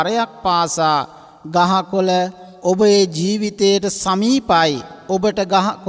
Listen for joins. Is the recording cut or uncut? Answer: cut